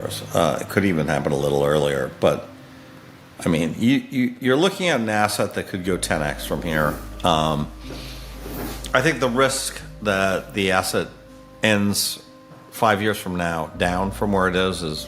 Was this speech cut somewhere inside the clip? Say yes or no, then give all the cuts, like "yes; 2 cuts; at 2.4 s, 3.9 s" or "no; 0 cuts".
no; 0 cuts